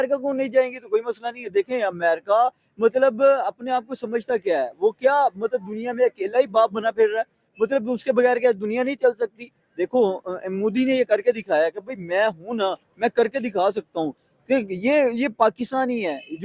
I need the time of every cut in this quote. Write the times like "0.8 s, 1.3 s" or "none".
none